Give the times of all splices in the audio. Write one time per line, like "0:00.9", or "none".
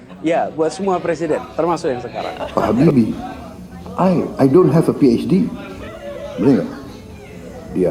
0:02.4